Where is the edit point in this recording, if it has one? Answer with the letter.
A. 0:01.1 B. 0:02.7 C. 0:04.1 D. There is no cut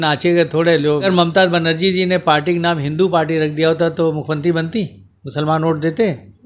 A